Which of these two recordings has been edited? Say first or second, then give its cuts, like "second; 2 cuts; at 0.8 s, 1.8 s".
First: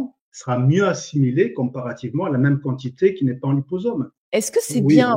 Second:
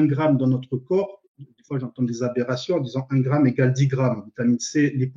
first; 1 cut; at 4.2 s